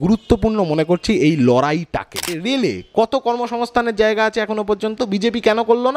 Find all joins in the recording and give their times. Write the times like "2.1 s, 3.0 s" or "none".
2.3 s